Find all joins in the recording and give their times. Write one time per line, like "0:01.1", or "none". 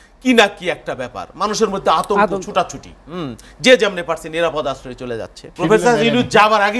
0:05.4